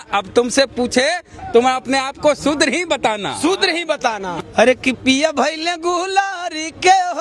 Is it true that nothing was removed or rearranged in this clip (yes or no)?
no